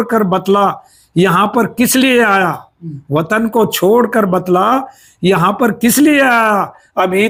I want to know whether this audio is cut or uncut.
uncut